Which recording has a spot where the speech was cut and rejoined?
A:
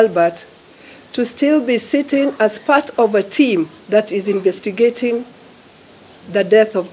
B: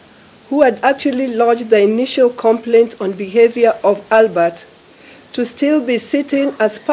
A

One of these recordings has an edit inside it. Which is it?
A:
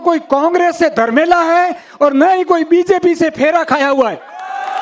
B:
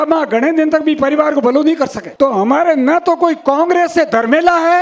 B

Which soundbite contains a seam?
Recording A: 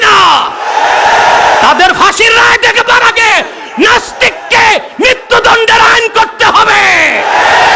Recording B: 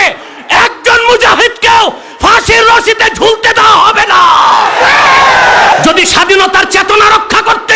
B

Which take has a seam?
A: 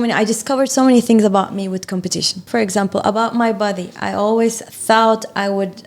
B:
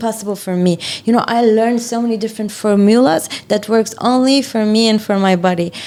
A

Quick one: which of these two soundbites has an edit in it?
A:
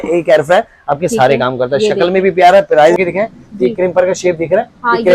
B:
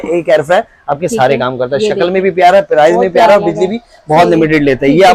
A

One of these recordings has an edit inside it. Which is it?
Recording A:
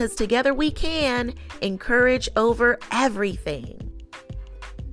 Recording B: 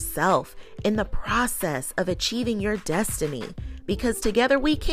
A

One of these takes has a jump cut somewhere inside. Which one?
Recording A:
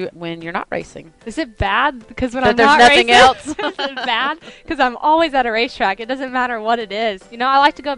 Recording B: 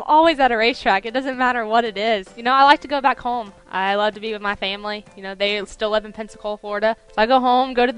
B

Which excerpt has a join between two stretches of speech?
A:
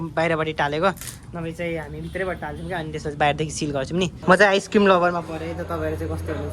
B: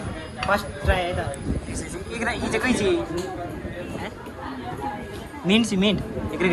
A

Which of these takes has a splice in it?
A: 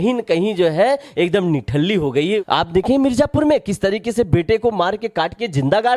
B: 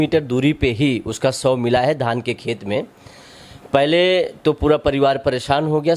A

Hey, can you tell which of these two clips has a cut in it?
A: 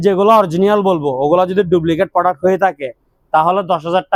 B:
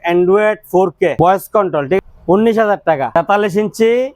B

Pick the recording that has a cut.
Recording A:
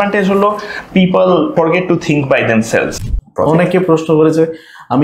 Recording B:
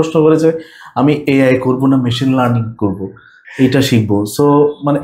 A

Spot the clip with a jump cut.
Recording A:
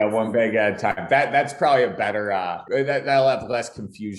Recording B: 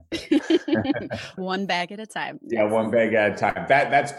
B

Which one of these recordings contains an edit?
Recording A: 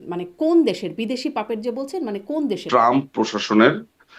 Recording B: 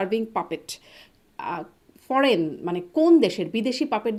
A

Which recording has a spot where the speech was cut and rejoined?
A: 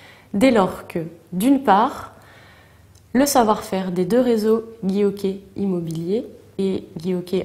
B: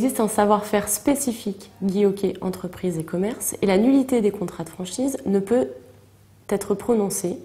A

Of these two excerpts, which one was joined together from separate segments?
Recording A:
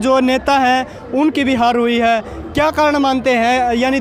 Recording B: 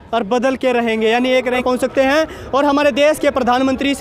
B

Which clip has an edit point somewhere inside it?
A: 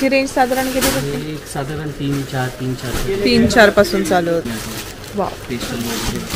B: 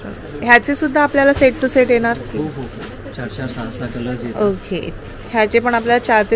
A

